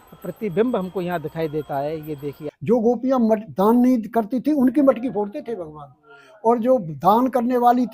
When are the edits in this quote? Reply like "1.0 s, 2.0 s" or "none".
2.5 s